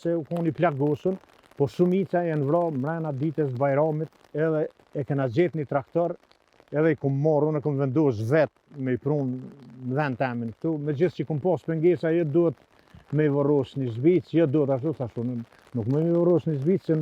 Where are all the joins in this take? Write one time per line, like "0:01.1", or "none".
0:04.2